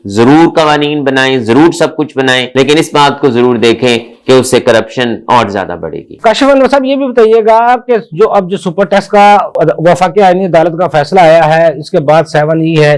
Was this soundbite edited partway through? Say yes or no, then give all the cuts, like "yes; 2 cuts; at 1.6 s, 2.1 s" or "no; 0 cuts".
no; 0 cuts